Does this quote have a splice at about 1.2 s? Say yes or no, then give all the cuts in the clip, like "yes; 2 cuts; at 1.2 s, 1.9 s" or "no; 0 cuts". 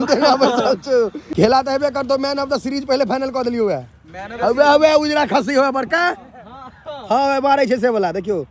yes; 1 cut; at 1.2 s